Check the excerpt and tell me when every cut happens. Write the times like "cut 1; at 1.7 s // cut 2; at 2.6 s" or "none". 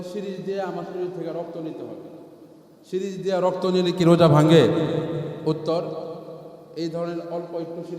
none